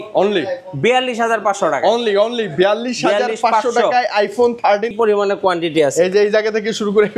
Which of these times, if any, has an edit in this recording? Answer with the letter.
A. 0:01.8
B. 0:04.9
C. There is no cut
B